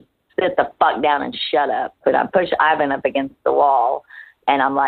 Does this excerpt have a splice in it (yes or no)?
yes